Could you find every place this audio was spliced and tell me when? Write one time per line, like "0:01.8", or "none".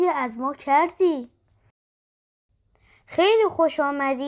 0:02.1